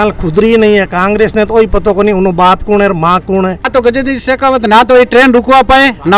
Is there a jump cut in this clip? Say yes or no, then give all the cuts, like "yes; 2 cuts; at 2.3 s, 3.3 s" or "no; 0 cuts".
yes; 1 cut; at 3.7 s